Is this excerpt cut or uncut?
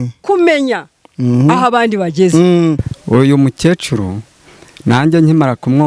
cut